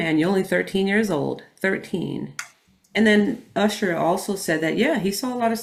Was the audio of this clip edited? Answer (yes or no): no